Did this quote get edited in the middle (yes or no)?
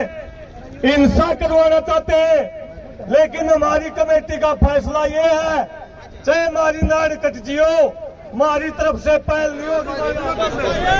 yes